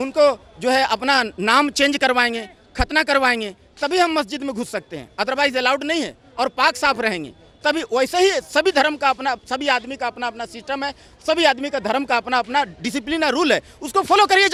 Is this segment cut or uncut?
uncut